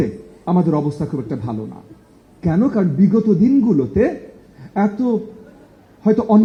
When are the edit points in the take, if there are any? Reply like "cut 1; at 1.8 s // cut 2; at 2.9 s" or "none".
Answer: none